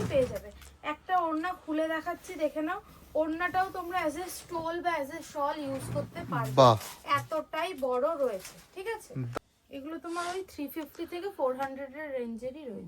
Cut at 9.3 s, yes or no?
yes